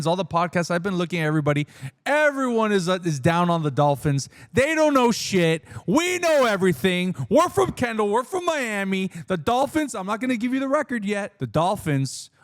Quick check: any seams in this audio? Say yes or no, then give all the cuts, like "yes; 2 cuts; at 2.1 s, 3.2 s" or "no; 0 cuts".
yes; 1 cut; at 11.3 s